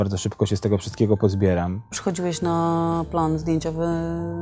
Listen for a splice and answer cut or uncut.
cut